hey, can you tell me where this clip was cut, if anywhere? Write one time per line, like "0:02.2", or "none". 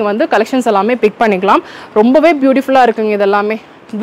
none